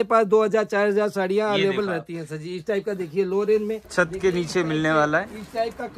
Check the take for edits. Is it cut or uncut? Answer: cut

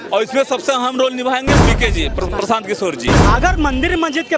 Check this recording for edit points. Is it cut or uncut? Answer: cut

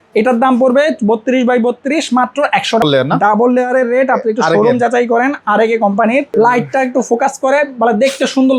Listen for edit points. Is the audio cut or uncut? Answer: cut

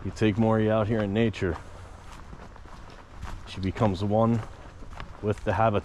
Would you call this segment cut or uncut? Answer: uncut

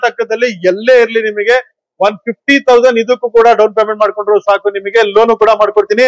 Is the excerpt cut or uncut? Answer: uncut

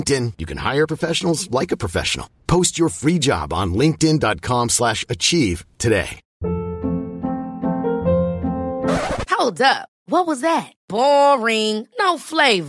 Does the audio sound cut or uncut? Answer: cut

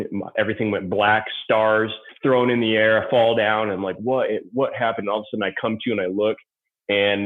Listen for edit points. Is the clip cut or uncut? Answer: cut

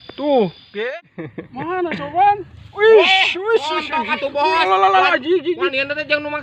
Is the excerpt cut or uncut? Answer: cut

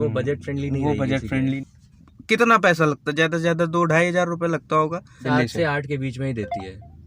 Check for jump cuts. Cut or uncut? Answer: cut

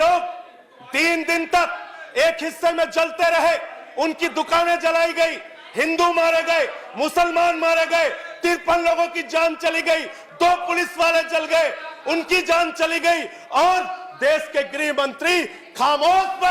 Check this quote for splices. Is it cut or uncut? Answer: uncut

